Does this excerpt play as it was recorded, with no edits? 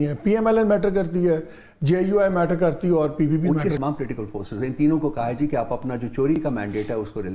no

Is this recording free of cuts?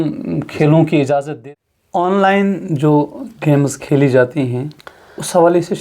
no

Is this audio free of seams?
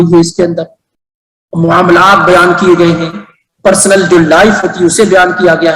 yes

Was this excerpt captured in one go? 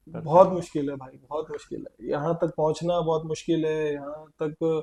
yes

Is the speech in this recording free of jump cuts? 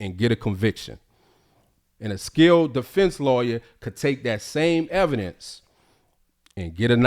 no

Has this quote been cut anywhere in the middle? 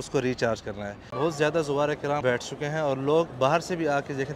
yes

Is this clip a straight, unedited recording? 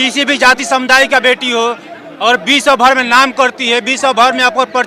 yes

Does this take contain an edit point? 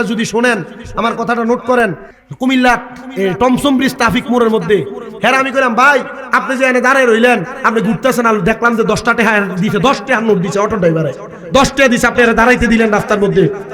yes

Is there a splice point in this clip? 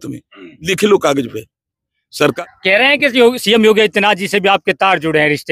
yes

